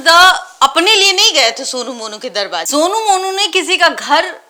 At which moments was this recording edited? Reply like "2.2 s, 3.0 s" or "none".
none

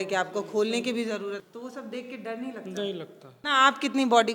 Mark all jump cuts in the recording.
1.4 s, 3.3 s

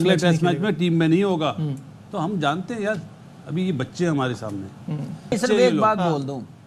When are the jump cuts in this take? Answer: 5.4 s

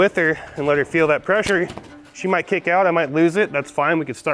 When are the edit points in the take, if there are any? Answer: none

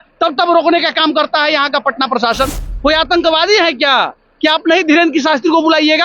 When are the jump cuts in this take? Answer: 2.6 s

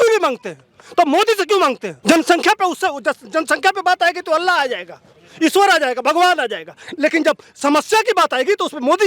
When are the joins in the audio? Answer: 1.9 s

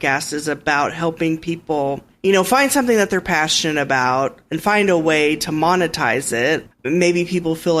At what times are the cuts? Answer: 2.1 s, 6.6 s

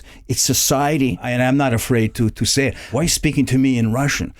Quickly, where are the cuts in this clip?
1.3 s, 2.8 s

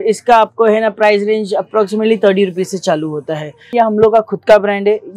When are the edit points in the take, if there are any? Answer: 3.7 s

